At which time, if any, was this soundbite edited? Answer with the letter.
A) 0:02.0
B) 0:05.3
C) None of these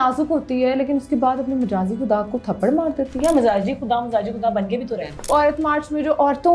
B